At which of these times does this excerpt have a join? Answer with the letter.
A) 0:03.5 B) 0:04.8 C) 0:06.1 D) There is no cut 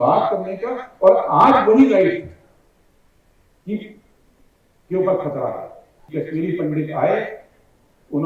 C